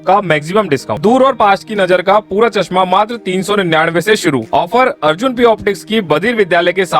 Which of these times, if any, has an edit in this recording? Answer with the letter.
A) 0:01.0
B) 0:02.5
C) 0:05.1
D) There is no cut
A